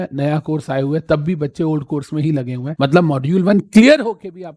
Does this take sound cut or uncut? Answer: cut